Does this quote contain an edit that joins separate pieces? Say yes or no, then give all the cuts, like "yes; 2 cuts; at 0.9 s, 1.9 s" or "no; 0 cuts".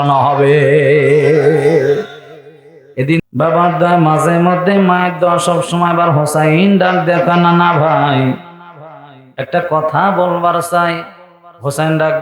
yes; 1 cut; at 3.2 s